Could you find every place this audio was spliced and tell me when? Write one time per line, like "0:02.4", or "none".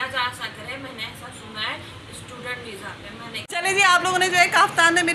0:03.5

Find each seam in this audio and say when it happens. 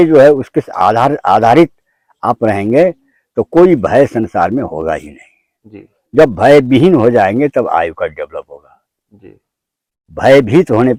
none

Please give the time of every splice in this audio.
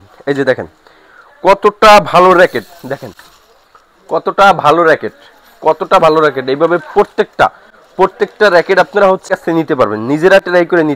0:09.2

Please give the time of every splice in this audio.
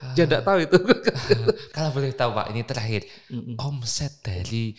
0:01.7

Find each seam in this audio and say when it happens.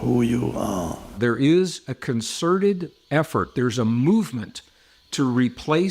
0:01.1

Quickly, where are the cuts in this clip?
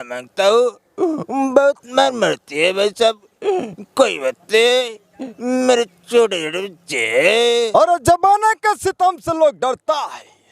0:07.7

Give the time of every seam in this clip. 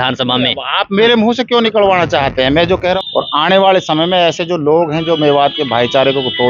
0:03.0

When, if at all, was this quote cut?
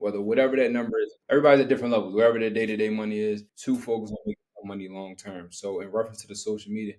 0:01.2

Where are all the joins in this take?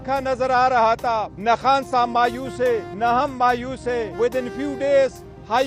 0:01.0
0:02.9
0:04.1

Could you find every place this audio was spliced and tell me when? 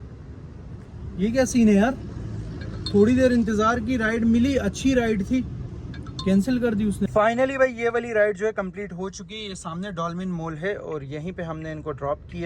0:07.1

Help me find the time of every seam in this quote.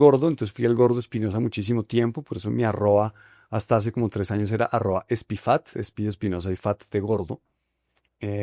none

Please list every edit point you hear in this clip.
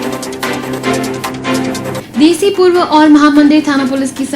0:01.7

